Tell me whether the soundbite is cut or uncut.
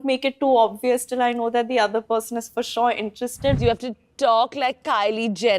cut